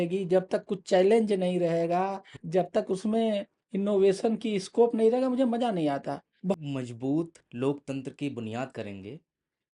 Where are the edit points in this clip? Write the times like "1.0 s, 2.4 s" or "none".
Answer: 6.6 s